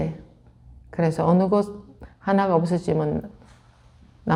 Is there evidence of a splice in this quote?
no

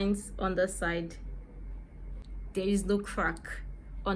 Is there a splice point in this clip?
yes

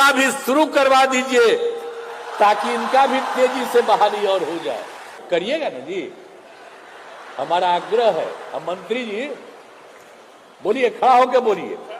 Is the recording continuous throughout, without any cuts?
no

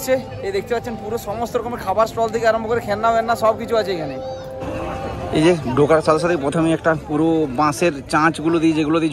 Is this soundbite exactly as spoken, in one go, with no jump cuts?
no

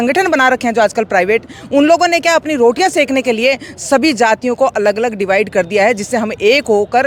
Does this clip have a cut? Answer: no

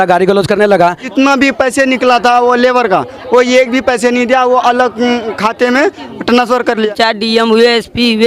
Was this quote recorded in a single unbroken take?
no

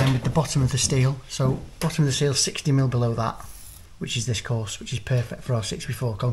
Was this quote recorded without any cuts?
yes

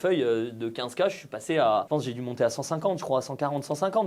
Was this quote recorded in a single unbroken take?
yes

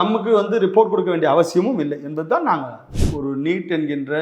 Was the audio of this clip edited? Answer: yes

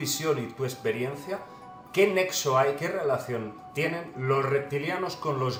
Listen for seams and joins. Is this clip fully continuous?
yes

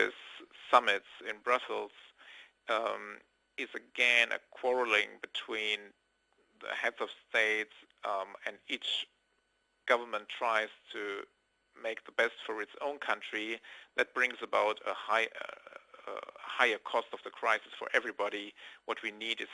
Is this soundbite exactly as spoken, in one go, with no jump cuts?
yes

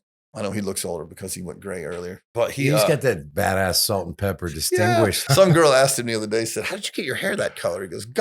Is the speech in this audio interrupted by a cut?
yes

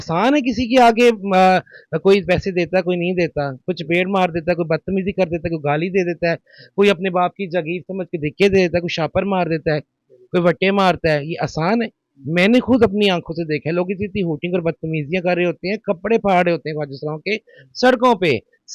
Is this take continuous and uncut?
yes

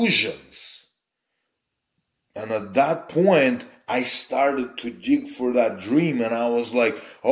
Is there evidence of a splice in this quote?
no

